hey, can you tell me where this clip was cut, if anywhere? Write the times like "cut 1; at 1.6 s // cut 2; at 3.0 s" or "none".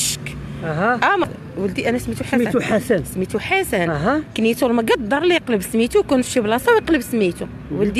cut 1; at 1.2 s